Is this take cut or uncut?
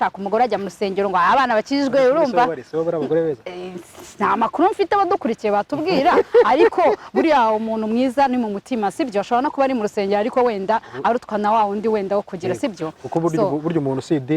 uncut